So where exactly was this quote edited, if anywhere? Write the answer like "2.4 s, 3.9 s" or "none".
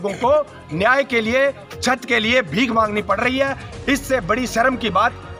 none